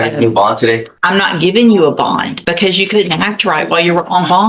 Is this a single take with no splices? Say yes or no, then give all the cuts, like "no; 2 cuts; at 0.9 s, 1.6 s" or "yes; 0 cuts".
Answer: no; 2 cuts; at 0.9 s, 2.3 s